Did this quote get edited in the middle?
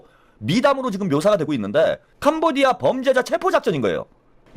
yes; 1 cut; at 2.1 s

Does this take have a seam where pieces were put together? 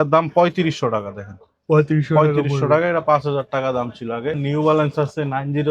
yes; 1 cut; at 4.4 s

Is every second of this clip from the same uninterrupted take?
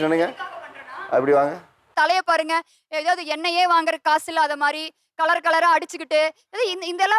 yes; 0 cuts

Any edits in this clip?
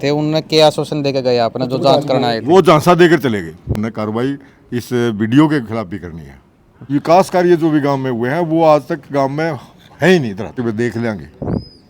yes; 3 cuts; at 3.8 s, 6.8 s, 10.6 s

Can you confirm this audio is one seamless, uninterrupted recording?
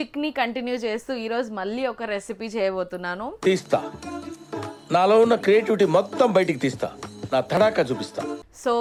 yes; 0 cuts

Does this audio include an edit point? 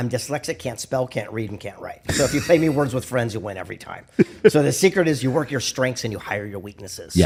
no; 0 cuts

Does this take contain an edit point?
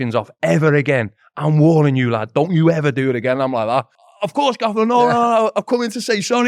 yes; 1 cut; at 4.0 s

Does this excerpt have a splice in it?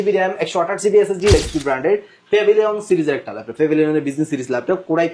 yes; 1 cut; at 1.3 s

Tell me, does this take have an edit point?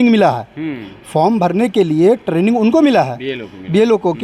no; 0 cuts

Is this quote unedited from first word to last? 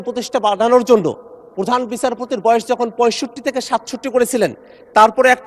yes; 0 cuts

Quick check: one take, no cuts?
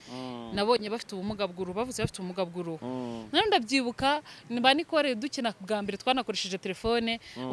no; 1 cut; at 2.8 s

